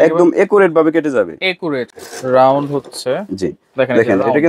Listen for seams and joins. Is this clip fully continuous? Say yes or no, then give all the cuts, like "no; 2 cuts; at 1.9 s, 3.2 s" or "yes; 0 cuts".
no; 1 cut; at 1.9 s